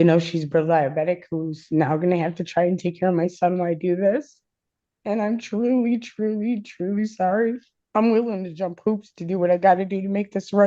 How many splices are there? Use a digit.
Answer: 1